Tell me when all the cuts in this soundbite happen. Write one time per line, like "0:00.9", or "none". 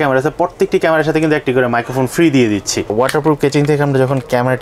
0:02.9